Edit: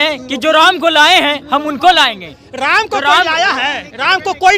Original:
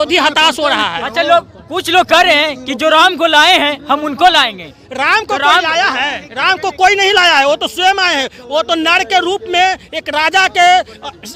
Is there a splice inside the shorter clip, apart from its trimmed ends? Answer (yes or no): no